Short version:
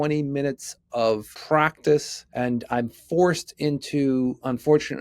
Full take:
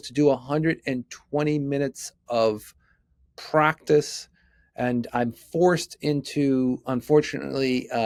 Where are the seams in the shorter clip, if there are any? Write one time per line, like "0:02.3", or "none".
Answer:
0:01.3
0:02.2